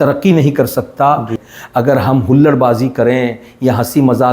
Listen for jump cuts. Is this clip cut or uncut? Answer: cut